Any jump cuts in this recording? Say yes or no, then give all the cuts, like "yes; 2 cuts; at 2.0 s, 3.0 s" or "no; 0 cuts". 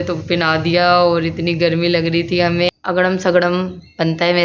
yes; 1 cut; at 2.7 s